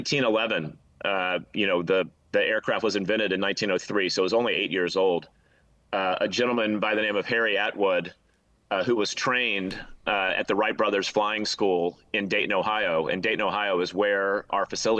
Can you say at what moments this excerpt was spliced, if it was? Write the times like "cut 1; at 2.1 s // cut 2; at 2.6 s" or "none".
none

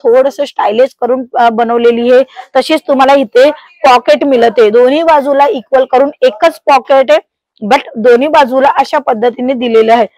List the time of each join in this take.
none

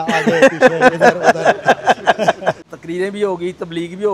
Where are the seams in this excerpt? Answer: cut 1; at 2.7 s

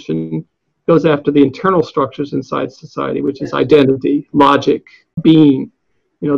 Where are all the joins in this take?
cut 1; at 5.1 s

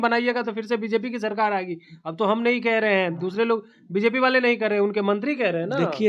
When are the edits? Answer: none

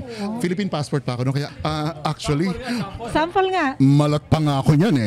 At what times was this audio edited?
cut 1; at 1.5 s

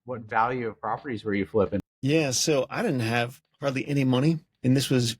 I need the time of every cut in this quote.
cut 1; at 1.9 s

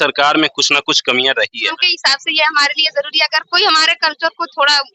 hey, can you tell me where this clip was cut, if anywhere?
cut 1; at 1.8 s

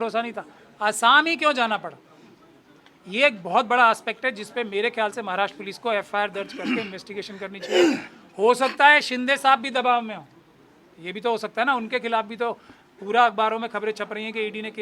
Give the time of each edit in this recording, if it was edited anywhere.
none

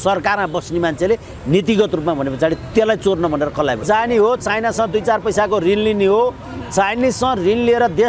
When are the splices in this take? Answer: cut 1; at 3.8 s

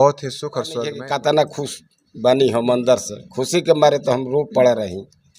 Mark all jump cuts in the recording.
cut 1; at 1.0 s

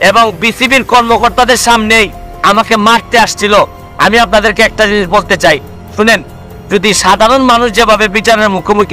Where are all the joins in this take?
cut 1; at 3.8 s

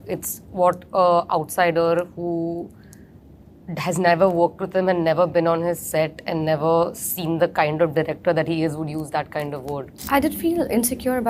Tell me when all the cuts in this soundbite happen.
cut 1; at 9.9 s

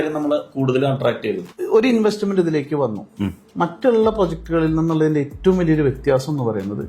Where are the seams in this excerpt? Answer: cut 1; at 1.5 s

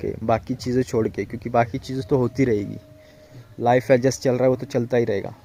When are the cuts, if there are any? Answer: none

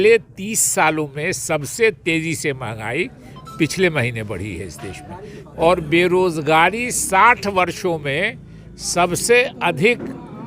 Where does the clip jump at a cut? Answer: cut 1; at 5.4 s

